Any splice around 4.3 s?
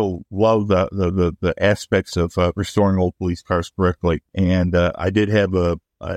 yes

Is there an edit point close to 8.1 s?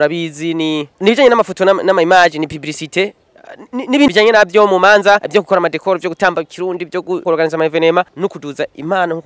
yes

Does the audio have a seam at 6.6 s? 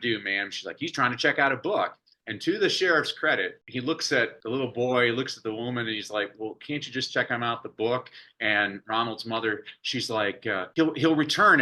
no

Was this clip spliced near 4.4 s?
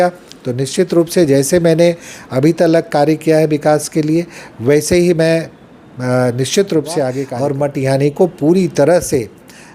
no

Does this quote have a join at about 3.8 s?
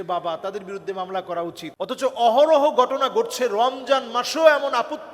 no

